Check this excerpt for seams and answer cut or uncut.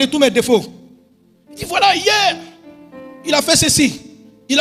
uncut